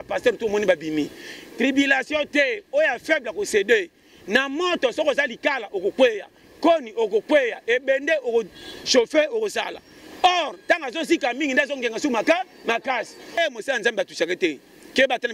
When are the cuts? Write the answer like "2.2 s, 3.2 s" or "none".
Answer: 13.4 s